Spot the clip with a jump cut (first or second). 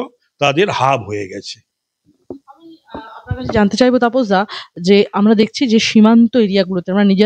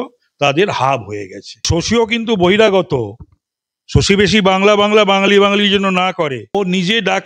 second